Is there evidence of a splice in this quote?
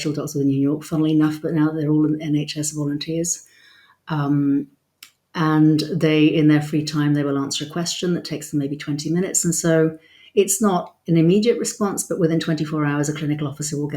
no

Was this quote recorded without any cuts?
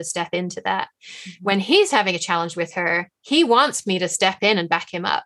yes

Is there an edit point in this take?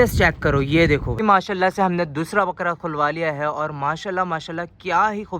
yes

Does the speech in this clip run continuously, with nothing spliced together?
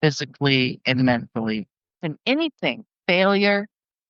no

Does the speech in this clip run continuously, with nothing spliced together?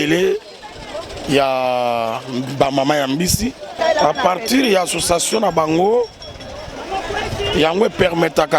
no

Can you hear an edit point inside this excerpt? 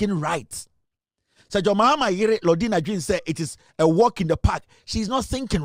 no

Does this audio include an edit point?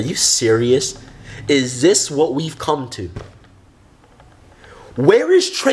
no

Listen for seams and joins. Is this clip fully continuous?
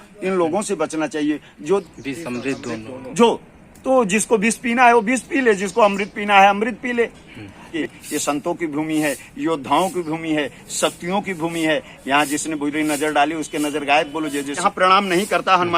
no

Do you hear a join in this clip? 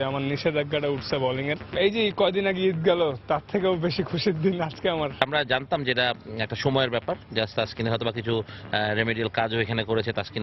yes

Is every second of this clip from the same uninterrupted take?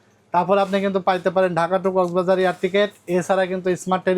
yes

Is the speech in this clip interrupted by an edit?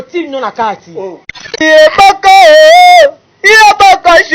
yes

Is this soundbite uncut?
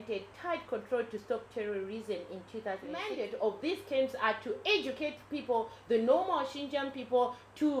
no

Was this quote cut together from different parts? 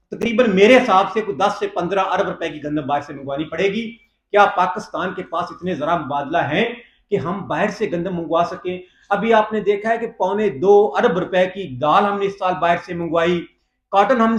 no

